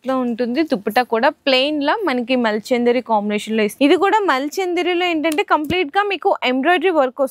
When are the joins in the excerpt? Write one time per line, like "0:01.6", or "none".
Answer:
0:03.7